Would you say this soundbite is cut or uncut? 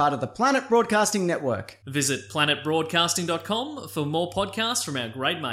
uncut